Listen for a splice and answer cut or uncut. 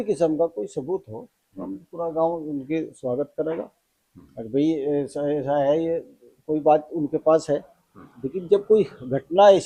uncut